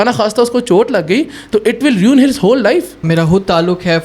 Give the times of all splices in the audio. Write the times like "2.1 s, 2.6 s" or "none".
3.0 s